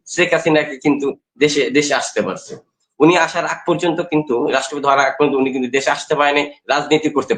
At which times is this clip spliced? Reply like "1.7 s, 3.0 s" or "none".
none